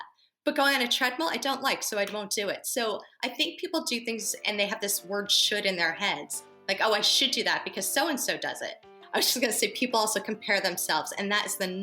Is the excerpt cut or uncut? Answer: cut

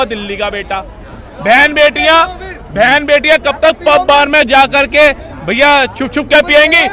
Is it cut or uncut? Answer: uncut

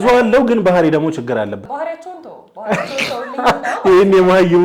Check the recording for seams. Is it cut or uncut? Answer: cut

